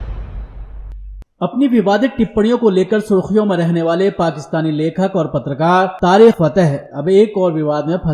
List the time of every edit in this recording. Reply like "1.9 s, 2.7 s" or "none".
7.0 s